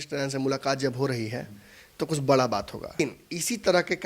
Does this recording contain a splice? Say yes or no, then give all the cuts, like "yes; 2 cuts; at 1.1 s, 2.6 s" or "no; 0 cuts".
yes; 1 cut; at 2.9 s